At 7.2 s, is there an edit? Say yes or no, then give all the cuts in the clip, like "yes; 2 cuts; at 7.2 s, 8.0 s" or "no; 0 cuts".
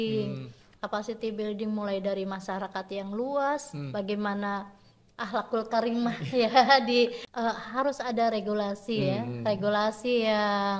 yes; 1 cut; at 7.2 s